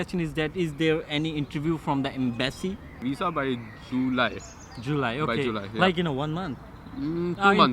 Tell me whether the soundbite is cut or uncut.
cut